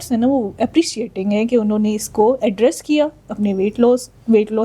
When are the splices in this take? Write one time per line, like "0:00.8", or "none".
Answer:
none